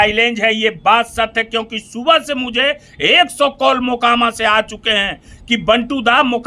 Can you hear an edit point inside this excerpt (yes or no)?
no